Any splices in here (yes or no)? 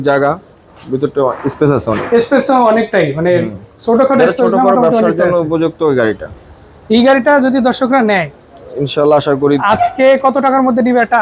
no